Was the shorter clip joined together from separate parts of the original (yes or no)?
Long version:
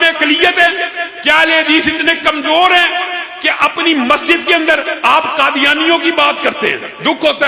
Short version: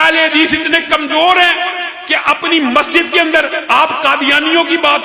no